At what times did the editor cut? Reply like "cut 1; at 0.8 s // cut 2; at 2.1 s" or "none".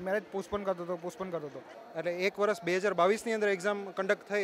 cut 1; at 1.7 s